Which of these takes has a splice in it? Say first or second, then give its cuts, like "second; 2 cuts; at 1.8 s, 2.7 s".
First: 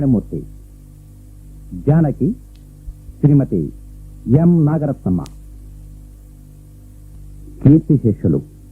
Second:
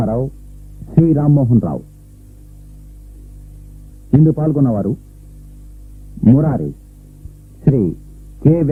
first; 1 cut; at 7.1 s